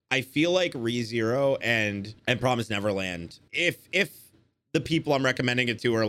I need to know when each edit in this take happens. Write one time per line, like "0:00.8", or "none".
0:02.1
0:03.4